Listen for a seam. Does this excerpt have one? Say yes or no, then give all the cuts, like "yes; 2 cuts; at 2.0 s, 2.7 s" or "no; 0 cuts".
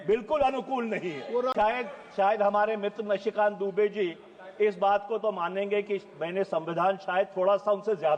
yes; 1 cut; at 1.5 s